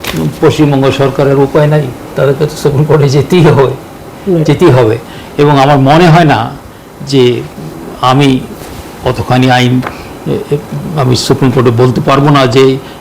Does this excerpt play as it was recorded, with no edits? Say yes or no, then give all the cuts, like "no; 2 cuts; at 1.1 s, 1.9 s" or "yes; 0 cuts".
yes; 0 cuts